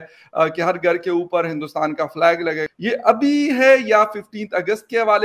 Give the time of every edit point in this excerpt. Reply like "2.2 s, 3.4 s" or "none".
2.7 s